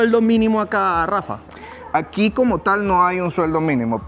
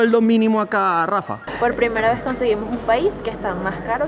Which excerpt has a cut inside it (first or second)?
second